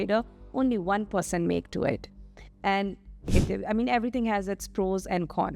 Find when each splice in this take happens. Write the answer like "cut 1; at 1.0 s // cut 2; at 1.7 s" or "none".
cut 1; at 3.3 s